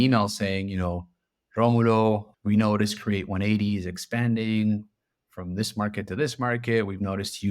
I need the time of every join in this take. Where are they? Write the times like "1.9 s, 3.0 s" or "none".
2.3 s